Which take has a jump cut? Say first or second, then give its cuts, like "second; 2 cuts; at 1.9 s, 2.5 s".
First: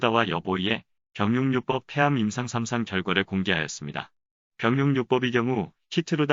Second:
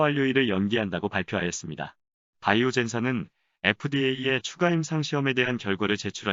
first; 1 cut; at 1.9 s